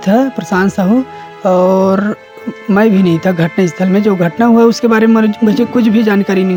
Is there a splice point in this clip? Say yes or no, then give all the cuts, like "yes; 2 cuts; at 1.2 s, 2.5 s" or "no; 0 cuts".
no; 0 cuts